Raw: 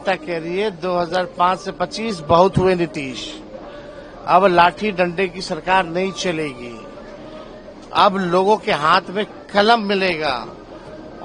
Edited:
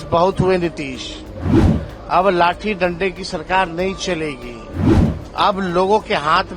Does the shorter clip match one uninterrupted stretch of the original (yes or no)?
no